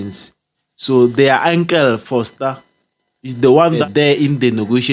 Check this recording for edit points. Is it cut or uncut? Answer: cut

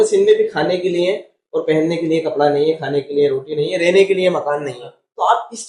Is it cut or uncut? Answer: uncut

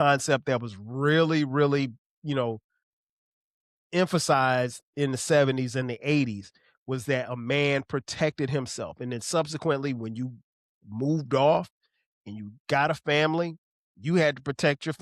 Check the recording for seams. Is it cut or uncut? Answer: uncut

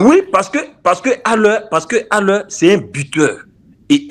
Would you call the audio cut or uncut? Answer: uncut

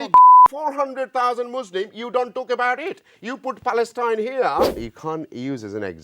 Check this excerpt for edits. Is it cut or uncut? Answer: cut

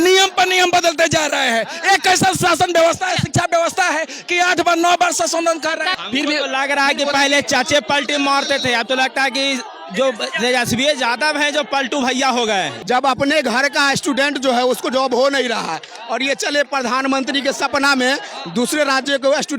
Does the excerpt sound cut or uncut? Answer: cut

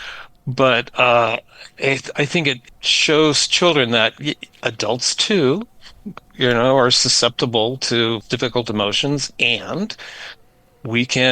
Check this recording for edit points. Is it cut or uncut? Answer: cut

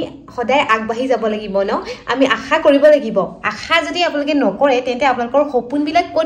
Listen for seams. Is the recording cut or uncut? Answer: uncut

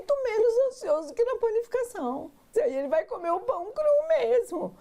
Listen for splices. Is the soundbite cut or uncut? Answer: cut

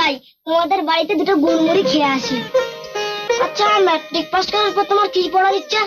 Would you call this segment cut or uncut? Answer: cut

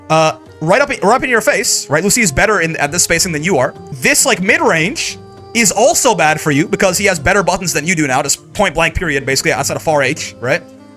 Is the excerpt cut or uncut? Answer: cut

